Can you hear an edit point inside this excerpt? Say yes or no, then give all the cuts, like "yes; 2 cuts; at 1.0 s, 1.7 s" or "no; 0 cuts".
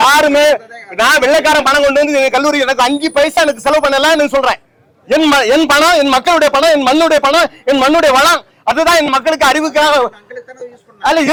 no; 0 cuts